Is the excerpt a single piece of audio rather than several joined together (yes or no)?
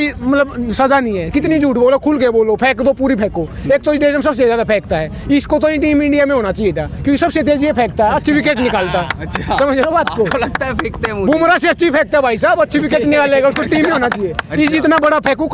yes